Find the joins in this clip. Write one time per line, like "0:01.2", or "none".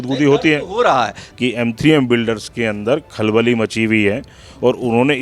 0:01.2